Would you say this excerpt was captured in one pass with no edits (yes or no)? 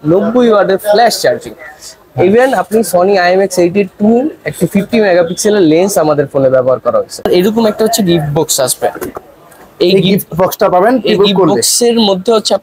no